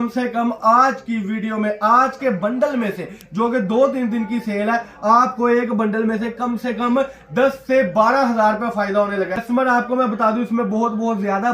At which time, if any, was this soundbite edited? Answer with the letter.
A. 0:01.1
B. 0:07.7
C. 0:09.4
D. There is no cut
C